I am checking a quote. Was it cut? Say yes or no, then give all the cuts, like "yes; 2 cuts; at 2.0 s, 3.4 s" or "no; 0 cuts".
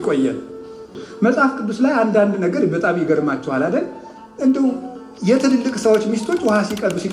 yes; 1 cut; at 1.0 s